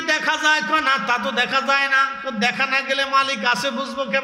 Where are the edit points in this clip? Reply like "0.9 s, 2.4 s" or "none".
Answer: none